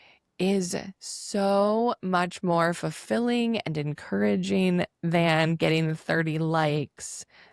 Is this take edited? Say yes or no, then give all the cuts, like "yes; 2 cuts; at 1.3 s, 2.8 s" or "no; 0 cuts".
no; 0 cuts